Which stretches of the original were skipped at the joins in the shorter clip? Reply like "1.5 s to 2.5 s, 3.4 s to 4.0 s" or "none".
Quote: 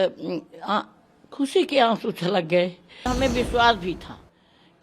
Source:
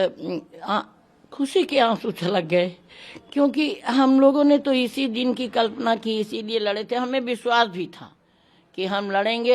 3.1 s to 7.0 s